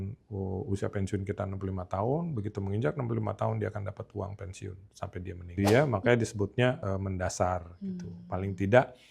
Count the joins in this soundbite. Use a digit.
1